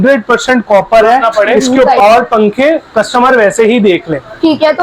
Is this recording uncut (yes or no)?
no